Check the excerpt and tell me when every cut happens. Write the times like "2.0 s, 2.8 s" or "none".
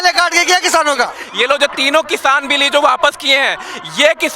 1.2 s